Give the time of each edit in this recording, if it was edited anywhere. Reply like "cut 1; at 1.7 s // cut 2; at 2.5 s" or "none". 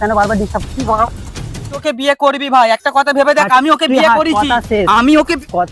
cut 1; at 1.8 s